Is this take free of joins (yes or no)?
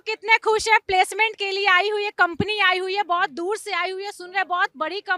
yes